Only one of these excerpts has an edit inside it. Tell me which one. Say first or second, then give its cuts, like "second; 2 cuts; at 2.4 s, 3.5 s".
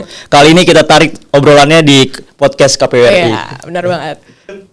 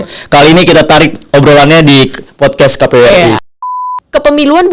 second; 1 cut; at 3.8 s